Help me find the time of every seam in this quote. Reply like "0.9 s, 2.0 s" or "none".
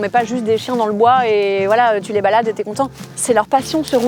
3.0 s